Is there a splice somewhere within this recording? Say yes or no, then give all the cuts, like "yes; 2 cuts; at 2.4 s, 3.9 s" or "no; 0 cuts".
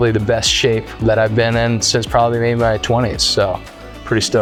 no; 0 cuts